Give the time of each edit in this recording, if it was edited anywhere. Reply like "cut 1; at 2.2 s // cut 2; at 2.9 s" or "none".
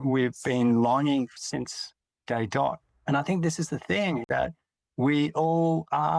cut 1; at 2.9 s // cut 2; at 4.2 s